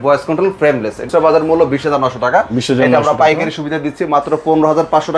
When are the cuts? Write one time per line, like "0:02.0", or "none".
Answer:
0:01.1